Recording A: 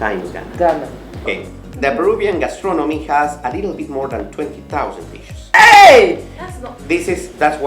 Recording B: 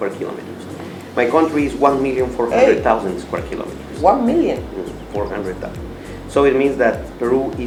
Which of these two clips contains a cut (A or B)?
A